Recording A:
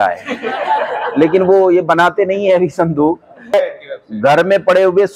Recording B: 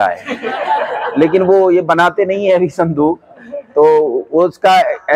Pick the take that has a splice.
A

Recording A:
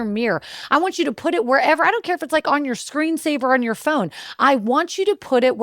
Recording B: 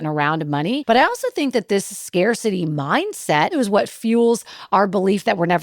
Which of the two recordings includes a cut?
B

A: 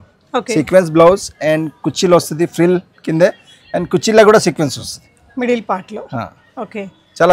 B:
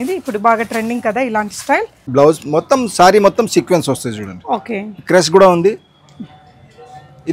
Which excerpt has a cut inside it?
B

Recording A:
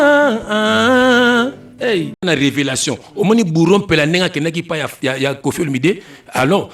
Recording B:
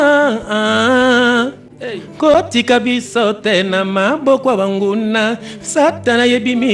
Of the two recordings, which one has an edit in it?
A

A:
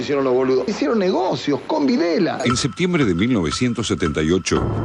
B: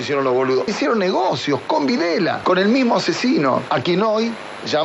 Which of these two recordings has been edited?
A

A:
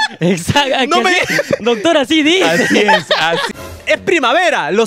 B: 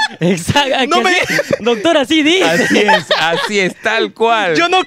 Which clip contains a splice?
A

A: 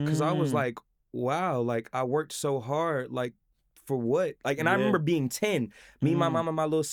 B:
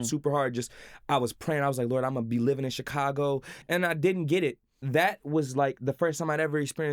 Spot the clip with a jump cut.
B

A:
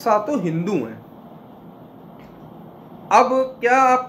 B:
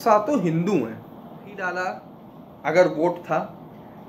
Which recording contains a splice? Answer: B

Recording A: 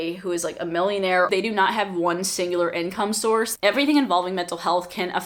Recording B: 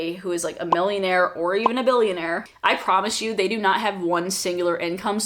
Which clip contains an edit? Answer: A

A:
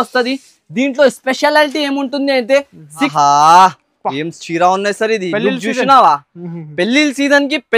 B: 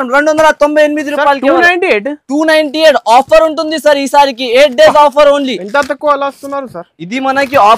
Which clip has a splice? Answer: A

